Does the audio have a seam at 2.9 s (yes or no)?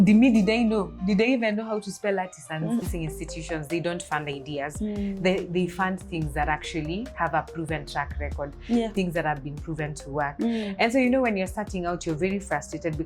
yes